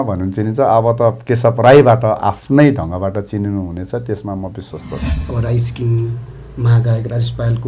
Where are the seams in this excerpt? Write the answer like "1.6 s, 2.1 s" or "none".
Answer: 5.1 s